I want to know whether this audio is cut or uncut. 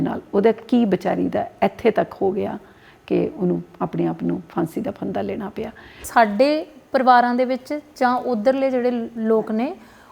cut